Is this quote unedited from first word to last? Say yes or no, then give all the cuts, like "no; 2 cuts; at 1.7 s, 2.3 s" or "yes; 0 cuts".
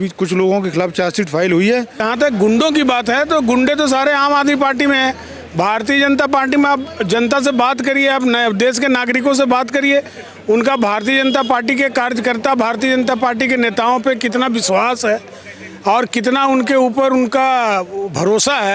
no; 1 cut; at 2.0 s